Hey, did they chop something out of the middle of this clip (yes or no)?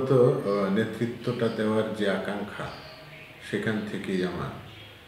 no